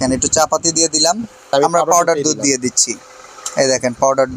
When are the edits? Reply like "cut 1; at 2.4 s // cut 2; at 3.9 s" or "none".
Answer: cut 1; at 1.4 s